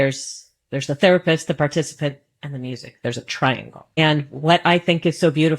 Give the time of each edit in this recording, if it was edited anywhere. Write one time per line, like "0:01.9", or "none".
0:04.0